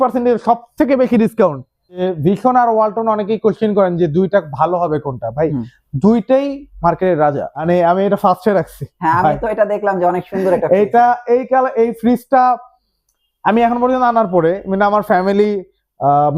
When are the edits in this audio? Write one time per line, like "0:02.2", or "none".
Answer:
0:02.0
0:07.6